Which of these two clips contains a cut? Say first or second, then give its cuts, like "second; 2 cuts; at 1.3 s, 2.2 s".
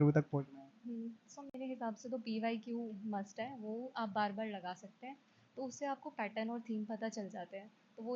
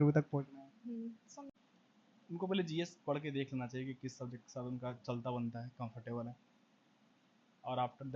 second; 1 cut; at 1.5 s